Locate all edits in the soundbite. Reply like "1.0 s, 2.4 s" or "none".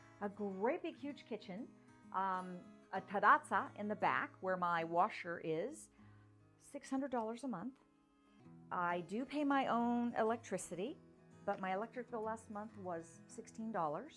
none

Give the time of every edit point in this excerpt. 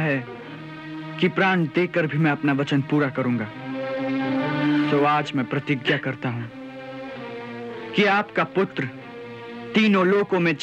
4.9 s

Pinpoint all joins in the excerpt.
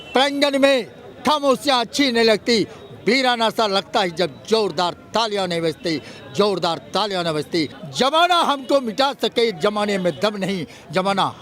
7.8 s

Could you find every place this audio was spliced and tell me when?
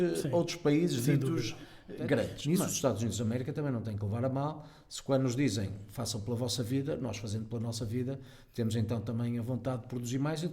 2.4 s

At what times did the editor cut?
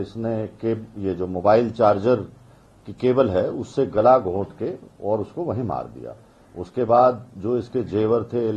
none

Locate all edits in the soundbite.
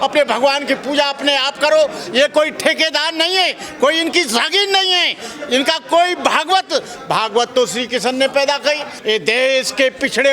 8.9 s

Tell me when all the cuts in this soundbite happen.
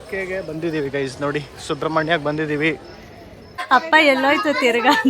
3.6 s

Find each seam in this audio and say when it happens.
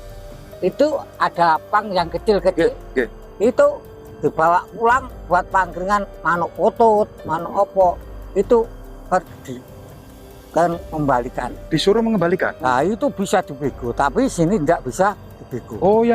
12.5 s

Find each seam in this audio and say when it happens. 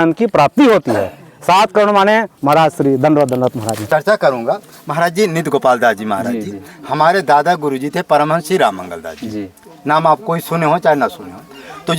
3.8 s

